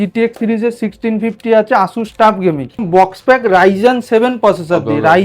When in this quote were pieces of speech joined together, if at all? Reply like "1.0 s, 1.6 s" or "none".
2.8 s

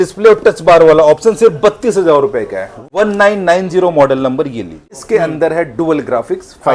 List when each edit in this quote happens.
2.7 s, 5.0 s

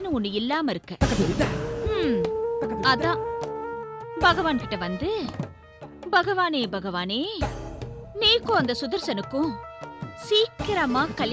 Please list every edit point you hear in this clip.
none

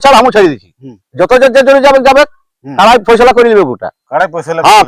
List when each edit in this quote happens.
none

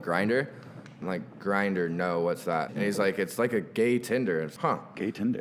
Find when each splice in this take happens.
1.0 s, 2.7 s, 4.5 s

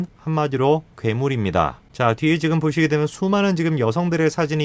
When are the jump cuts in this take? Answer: none

